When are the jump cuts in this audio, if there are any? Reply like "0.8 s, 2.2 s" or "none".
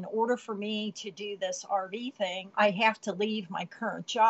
2.4 s